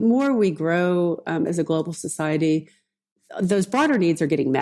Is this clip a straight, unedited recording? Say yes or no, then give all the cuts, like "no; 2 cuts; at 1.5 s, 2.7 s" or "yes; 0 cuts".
yes; 0 cuts